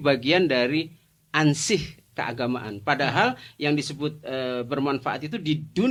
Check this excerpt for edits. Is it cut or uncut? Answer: uncut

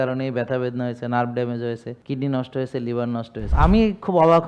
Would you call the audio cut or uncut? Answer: cut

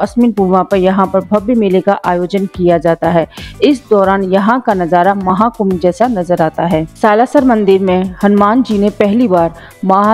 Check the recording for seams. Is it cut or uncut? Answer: uncut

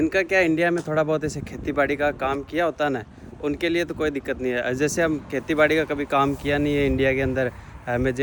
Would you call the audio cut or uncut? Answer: uncut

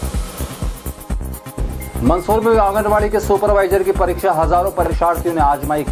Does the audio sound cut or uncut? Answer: uncut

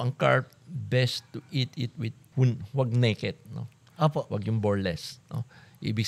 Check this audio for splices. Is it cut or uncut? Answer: cut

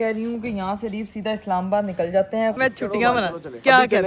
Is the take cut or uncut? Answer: cut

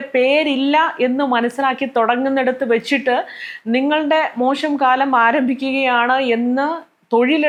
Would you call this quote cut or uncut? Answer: uncut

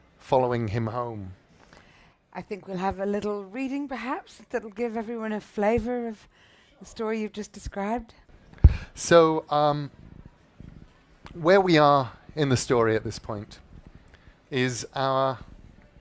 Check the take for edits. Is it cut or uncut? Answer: uncut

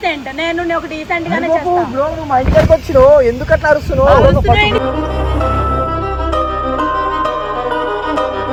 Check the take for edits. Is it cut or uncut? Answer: uncut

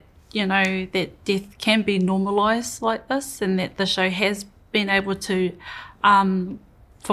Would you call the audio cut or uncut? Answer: uncut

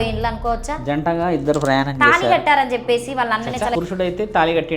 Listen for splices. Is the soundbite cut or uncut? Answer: cut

